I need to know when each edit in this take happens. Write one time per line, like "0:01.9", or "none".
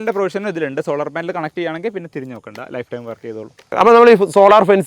0:03.7